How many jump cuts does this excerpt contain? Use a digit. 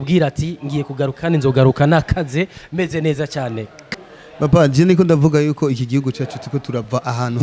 1